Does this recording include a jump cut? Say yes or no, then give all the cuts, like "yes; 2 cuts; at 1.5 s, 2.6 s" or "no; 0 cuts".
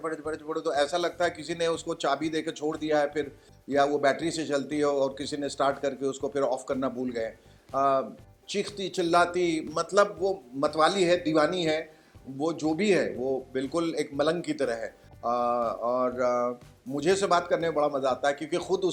no; 0 cuts